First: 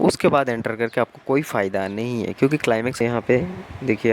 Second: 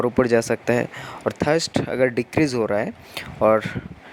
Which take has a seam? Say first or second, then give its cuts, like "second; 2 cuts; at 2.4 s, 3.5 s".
first; 1 cut; at 3.0 s